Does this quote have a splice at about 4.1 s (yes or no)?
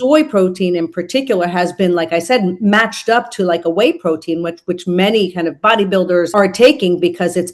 no